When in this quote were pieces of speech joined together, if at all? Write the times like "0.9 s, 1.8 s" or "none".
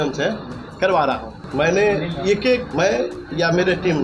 1.4 s, 2.7 s